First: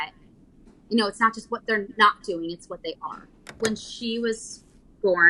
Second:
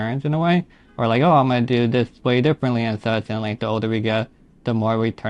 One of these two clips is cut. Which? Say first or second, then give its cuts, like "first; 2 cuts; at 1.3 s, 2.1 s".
first; 1 cut; at 3.5 s